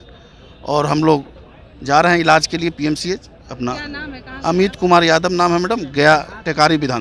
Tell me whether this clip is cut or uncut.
uncut